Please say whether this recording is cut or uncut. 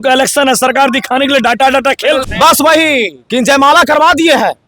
cut